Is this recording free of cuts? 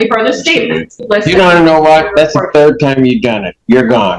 no; 1 cut; at 1.0 s

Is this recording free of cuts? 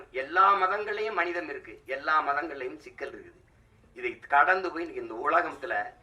yes; 0 cuts

